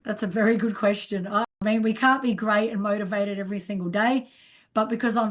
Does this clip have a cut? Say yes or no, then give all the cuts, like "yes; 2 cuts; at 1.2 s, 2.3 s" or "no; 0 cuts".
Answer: yes; 1 cut; at 1.5 s